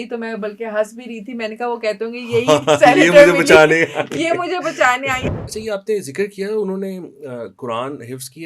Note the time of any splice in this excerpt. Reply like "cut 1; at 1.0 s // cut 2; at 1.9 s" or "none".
cut 1; at 5.2 s

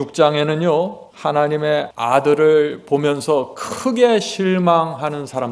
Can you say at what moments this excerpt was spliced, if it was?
cut 1; at 1.5 s

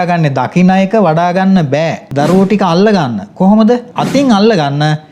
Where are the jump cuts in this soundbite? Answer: cut 1; at 2.0 s // cut 2; at 3.9 s

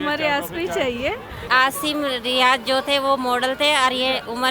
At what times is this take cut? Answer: cut 1; at 1.4 s

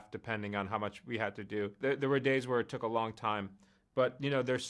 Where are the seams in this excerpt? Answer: cut 1; at 1.8 s

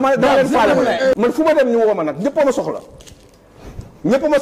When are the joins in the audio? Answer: cut 1; at 1.1 s

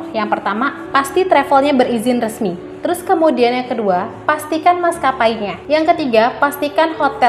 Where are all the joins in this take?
cut 1; at 2.7 s // cut 2; at 5.5 s

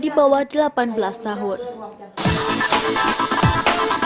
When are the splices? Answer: cut 1; at 2.2 s

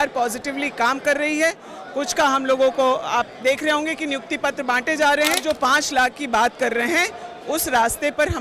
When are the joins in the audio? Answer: cut 1; at 5.4 s

